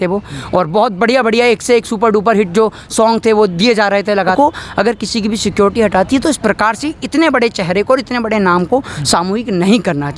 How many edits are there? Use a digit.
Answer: 1